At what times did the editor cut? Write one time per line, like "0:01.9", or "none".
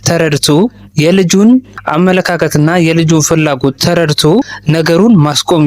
0:01.8
0:04.6